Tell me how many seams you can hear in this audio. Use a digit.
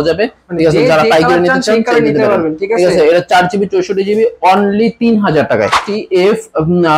1